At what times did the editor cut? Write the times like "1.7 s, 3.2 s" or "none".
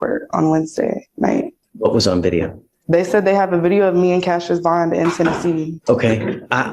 1.6 s, 5.8 s